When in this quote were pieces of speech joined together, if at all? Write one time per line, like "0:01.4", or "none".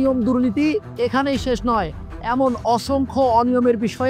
none